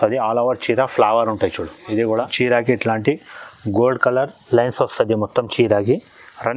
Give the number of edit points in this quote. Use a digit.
1